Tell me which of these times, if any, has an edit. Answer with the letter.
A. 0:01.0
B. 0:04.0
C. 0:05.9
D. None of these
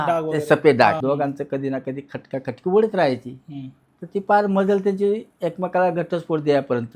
A